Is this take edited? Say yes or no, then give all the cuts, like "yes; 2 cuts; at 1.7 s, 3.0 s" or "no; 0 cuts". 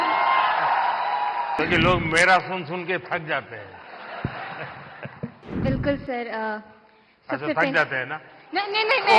yes; 2 cuts; at 1.6 s, 5.4 s